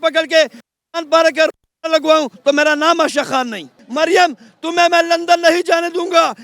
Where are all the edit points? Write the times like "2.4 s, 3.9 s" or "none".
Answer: 3.8 s